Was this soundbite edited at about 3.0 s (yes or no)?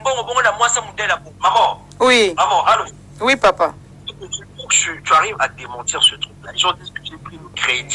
no